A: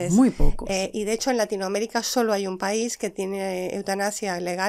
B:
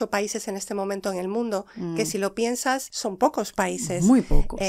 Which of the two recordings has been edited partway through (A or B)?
B